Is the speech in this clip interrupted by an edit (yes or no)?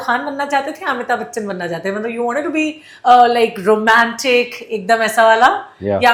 no